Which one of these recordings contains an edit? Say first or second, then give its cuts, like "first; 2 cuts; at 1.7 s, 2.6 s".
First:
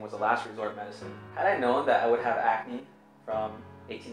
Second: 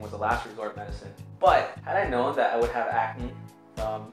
first; 1 cut; at 1.3 s